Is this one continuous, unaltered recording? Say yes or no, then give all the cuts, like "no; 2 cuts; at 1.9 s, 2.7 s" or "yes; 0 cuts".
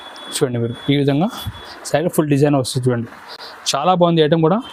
yes; 0 cuts